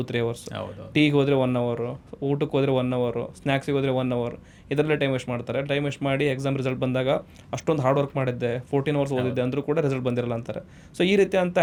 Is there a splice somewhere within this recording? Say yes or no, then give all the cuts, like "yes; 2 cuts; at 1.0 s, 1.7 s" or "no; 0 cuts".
no; 0 cuts